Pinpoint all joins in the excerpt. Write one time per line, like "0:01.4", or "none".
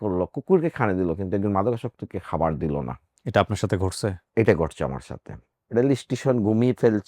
none